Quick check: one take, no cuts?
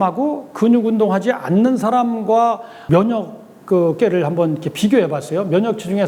yes; 0 cuts

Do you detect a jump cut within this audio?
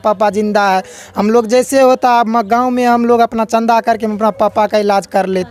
no; 0 cuts

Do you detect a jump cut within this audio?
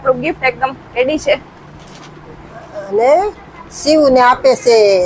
no; 0 cuts

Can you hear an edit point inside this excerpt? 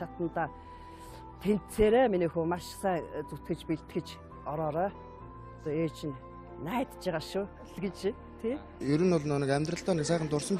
yes; 1 cut; at 2.7 s

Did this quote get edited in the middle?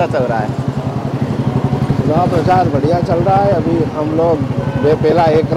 no; 0 cuts

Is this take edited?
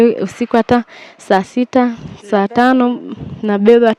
no; 0 cuts

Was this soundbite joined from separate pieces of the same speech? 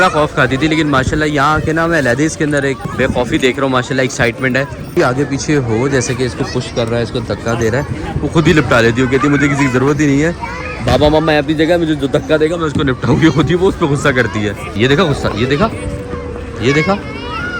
yes; 3 cuts; at 2.9 s, 4.8 s, 14.7 s

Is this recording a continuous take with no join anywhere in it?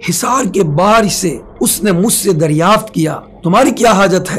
no; 2 cuts; at 1.4 s, 3.3 s

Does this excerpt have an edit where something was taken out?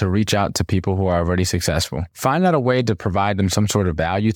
no; 0 cuts

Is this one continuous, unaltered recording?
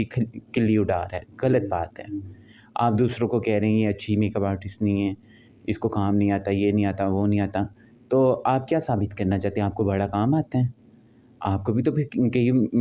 yes; 0 cuts

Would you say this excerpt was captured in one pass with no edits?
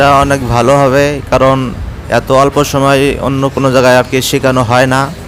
yes; 0 cuts

